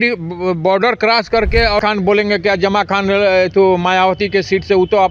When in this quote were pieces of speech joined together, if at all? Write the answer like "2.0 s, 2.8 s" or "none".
1.8 s